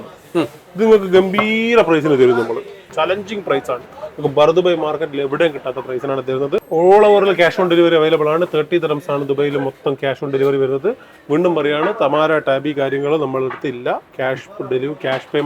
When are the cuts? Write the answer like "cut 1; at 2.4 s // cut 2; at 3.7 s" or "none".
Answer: cut 1; at 2.9 s // cut 2; at 6.6 s